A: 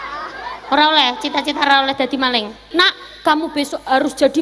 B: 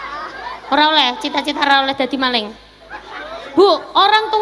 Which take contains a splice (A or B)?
A